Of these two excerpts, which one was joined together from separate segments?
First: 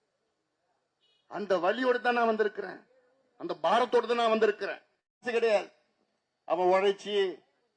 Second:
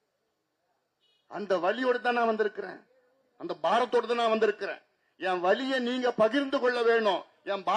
first; 1 cut; at 5.2 s

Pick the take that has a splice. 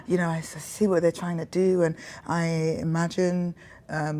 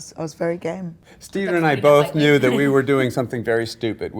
second; 1 cut; at 1.2 s

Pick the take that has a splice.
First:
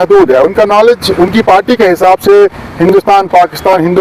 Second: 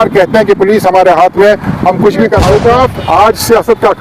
second; 1 cut; at 2.4 s

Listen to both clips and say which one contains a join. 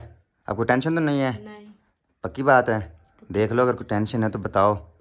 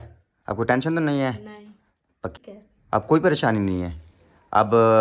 second; 1 cut; at 2.3 s

